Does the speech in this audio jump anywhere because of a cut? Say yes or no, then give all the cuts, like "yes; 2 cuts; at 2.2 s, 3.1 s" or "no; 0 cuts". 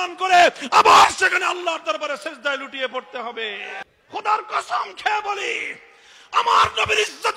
yes; 1 cut; at 3.8 s